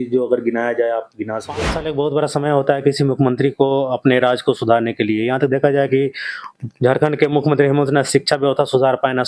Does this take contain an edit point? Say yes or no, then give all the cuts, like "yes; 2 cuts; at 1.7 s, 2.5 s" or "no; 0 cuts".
yes; 1 cut; at 1.7 s